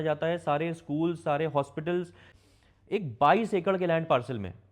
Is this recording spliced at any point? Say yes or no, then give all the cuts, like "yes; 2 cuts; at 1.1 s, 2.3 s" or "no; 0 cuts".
yes; 1 cut; at 2.3 s